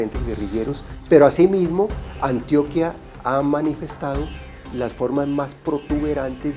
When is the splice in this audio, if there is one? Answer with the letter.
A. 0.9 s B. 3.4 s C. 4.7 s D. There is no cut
A